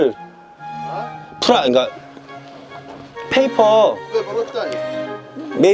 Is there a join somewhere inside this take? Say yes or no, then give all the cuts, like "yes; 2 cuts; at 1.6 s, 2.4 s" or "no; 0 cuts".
no; 0 cuts